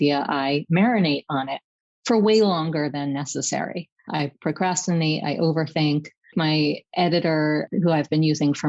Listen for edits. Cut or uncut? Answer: cut